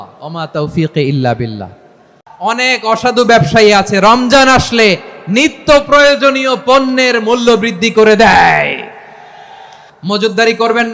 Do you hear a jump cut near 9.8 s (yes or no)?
yes